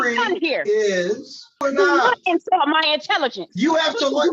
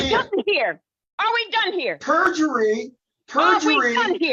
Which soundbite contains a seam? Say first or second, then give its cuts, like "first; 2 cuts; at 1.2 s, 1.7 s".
first; 1 cut; at 1.6 s